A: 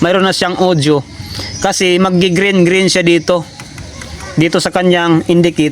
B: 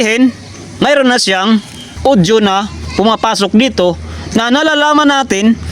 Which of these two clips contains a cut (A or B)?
B